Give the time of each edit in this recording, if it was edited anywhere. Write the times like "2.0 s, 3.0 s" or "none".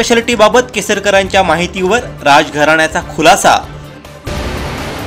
4.2 s